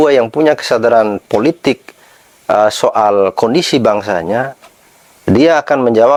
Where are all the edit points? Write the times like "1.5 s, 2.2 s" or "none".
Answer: none